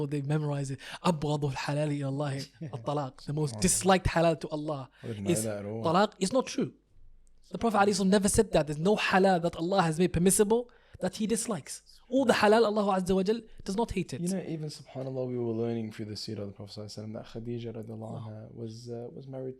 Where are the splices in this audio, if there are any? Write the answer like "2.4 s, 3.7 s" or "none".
none